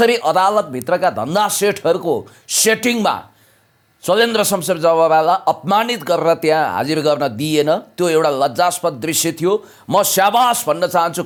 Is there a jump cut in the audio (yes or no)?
no